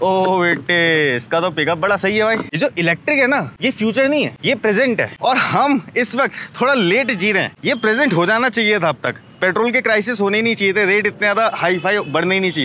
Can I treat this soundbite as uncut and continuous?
no; 5 cuts; at 2.5 s, 3.5 s, 4.4 s, 5.1 s, 7.5 s

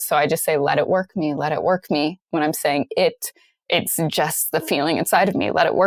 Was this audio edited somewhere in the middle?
no; 0 cuts

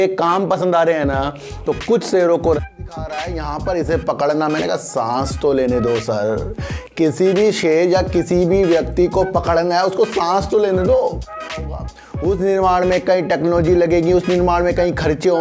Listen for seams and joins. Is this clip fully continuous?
no; 2 cuts; at 2.6 s, 11.6 s

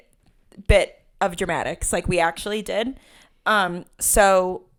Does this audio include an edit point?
no; 0 cuts

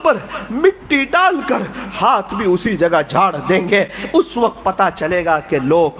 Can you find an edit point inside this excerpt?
no; 0 cuts

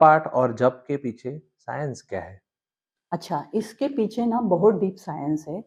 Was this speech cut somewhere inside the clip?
no; 0 cuts

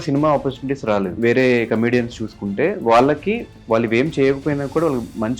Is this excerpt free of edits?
no; 1 cut; at 1.2 s

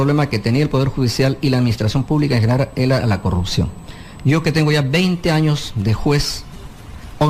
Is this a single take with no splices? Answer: no; 1 cut; at 2.1 s

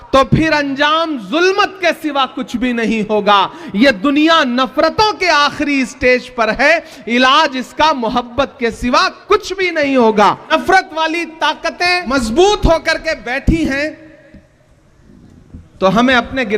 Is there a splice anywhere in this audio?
yes; 2 cuts; at 10.5 s, 12.1 s

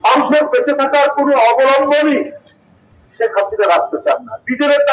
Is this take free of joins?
yes; 0 cuts

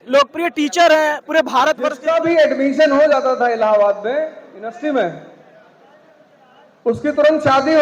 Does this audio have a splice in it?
yes; 1 cut; at 1.9 s

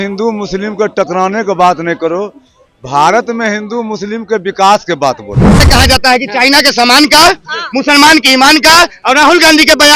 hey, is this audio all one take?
no; 1 cut; at 5.6 s

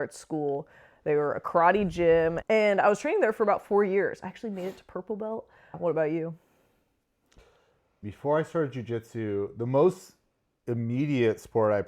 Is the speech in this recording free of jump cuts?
no; 3 cuts; at 2.4 s, 5.8 s, 8.0 s

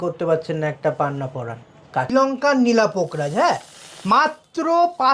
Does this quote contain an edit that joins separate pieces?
yes; 1 cut; at 2.1 s

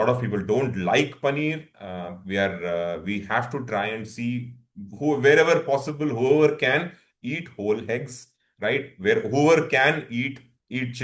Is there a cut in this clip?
no; 0 cuts

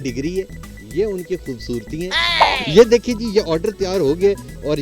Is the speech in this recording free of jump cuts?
no; 1 cut; at 2.5 s

